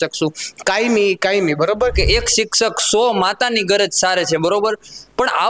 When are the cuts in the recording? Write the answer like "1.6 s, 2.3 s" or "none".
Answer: 2.0 s

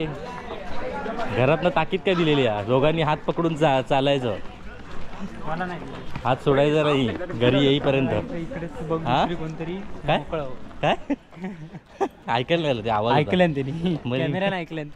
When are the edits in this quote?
none

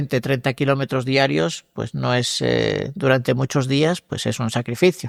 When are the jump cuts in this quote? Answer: none

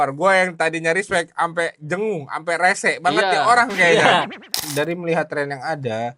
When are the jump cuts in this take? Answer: 4.6 s

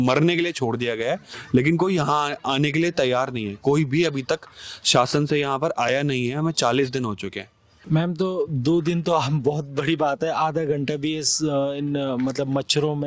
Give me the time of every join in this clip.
none

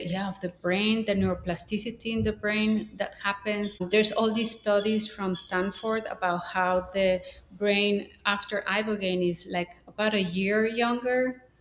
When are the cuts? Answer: 3.9 s

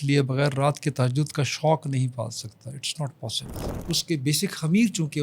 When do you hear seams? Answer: 3.7 s

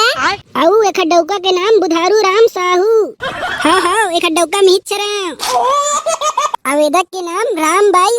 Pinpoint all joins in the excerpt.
6.5 s

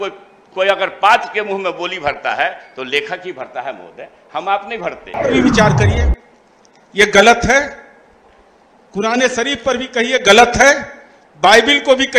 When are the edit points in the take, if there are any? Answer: 5.1 s

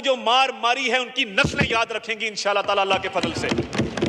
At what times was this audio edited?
none

